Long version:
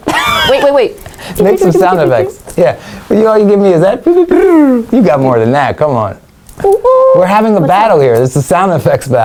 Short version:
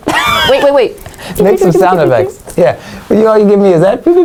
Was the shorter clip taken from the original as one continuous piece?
yes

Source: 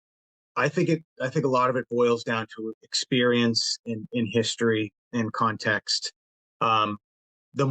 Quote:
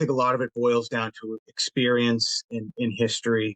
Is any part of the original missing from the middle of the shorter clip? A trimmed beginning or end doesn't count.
no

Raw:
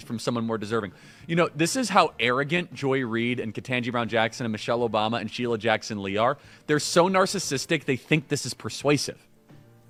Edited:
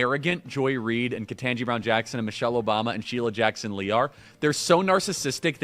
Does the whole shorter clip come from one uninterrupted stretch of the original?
yes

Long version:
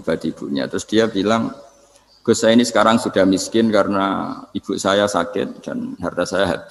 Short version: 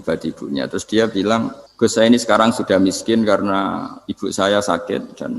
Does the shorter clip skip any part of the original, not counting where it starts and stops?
yes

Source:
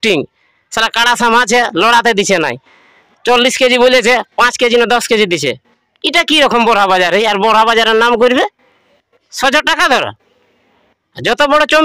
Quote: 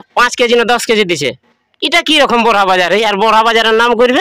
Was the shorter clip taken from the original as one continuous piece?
yes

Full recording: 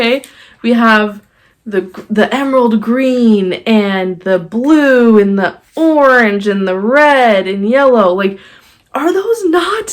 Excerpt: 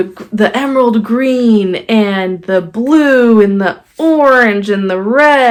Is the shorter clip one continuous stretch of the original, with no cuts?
yes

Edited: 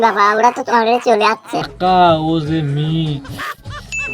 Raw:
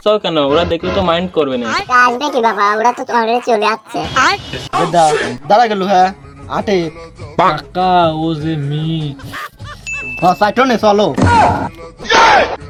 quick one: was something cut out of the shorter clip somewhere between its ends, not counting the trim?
yes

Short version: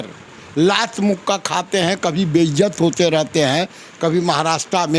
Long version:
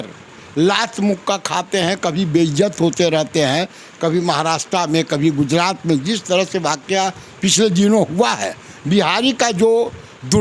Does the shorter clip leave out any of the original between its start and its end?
no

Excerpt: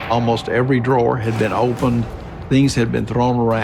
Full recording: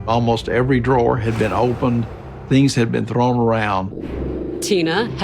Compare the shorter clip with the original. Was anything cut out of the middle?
no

